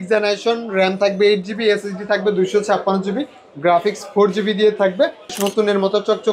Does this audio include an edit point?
yes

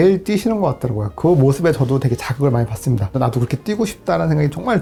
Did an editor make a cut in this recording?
no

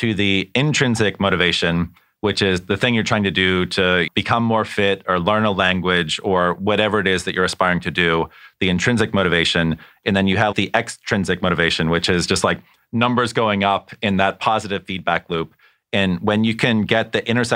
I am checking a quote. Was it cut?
yes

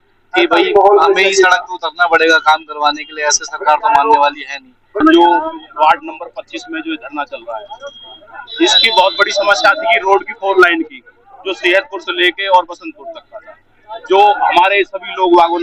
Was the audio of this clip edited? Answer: yes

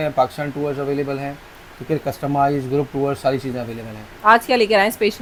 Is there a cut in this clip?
no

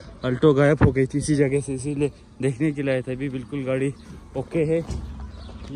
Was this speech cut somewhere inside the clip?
no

